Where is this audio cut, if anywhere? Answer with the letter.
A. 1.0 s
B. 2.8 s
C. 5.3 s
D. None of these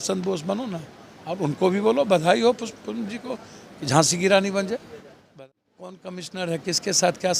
C